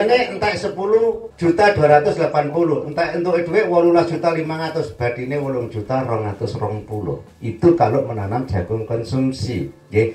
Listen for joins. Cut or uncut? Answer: cut